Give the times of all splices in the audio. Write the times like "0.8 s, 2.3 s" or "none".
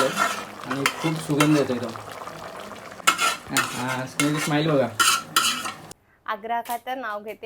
2.9 s, 5.8 s